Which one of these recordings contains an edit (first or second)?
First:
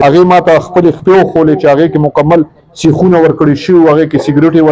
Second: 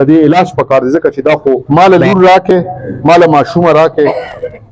second